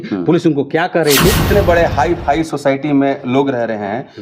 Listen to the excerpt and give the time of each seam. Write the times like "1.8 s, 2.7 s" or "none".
1.4 s